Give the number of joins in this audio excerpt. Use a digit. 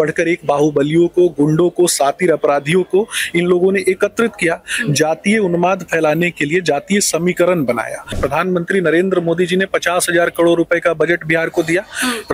1